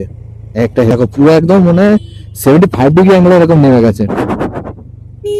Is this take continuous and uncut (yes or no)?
no